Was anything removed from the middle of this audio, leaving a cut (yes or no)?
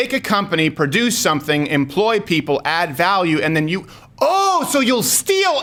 no